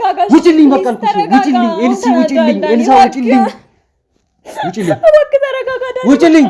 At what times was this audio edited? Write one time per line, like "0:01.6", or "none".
none